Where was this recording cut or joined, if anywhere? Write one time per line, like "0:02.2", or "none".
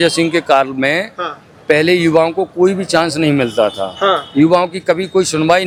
none